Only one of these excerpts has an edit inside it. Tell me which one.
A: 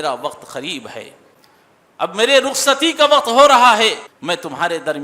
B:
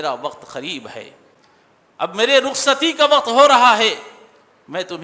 A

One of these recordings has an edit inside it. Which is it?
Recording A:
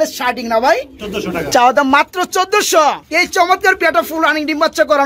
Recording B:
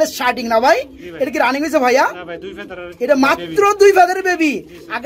A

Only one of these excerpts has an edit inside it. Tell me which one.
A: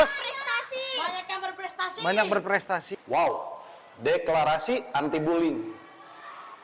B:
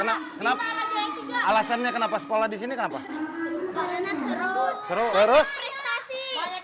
A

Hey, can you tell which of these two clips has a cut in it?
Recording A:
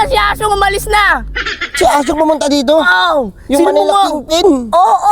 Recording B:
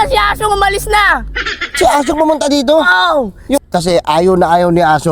B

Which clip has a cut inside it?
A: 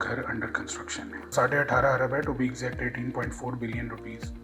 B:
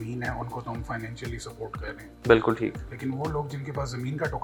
A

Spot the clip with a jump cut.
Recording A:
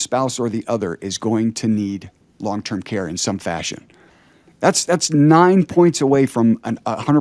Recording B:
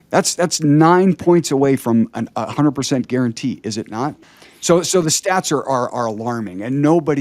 B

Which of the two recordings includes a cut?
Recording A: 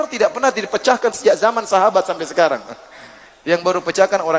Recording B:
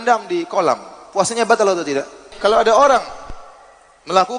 B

